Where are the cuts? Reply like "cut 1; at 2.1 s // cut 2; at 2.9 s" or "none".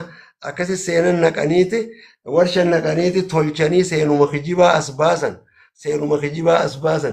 none